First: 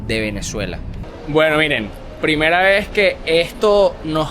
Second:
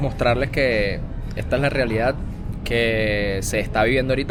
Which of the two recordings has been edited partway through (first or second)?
first